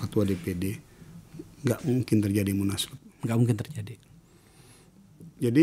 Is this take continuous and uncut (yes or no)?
yes